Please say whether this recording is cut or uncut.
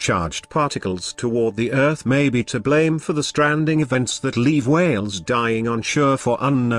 cut